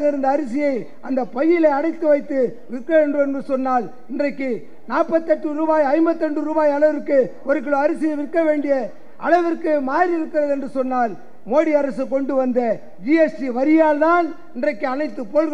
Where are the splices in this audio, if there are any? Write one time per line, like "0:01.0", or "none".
none